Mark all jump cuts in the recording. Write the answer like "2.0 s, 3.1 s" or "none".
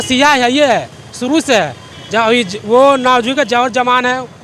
none